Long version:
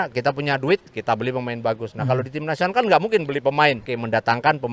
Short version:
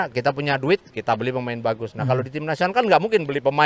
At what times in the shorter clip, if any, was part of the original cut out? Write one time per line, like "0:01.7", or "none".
none